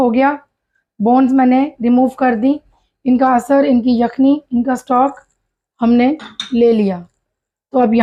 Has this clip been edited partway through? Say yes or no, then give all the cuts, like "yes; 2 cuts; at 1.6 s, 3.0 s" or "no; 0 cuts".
no; 0 cuts